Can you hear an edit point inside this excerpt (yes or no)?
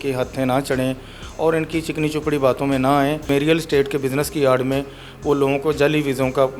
yes